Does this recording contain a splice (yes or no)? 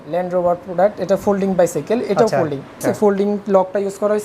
yes